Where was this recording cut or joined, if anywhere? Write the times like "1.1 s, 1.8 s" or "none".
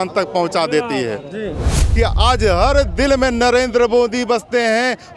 1.8 s